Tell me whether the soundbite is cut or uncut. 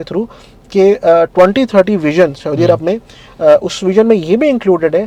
uncut